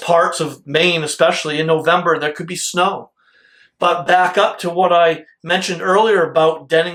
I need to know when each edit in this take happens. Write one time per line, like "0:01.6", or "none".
none